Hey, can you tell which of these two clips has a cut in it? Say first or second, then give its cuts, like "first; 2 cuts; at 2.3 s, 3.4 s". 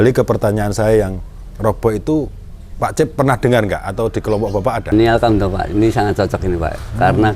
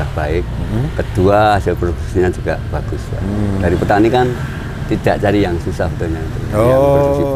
first; 1 cut; at 4.9 s